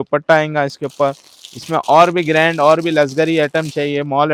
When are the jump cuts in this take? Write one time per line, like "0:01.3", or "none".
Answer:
none